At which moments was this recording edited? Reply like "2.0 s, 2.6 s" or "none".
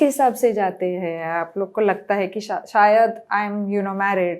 none